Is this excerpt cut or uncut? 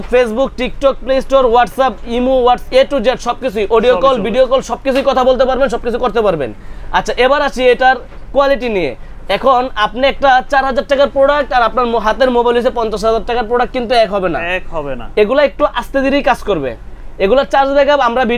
uncut